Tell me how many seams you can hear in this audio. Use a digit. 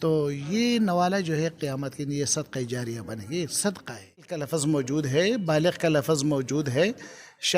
1